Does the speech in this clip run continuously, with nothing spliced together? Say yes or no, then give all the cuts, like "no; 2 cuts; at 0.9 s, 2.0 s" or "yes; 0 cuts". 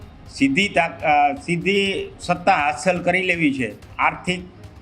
no; 1 cut; at 3.8 s